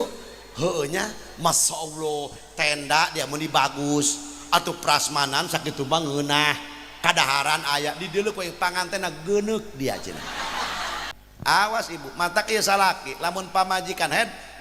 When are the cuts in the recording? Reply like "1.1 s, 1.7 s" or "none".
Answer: 11.1 s